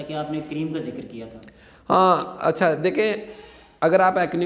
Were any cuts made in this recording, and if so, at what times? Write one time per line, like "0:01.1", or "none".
none